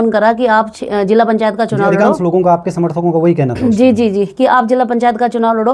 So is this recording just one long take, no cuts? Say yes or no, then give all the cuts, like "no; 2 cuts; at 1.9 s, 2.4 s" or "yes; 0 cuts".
yes; 0 cuts